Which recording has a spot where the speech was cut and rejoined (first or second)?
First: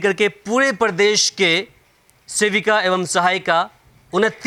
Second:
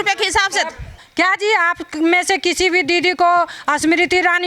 second